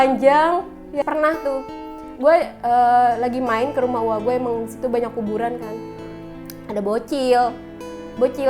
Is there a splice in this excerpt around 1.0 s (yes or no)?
yes